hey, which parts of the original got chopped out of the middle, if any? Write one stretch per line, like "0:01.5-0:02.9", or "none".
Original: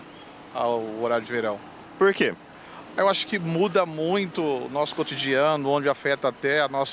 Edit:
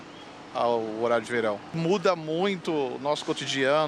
0:01.7-0:03.4